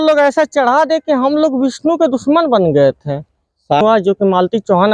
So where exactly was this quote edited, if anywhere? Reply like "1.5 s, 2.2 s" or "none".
3.8 s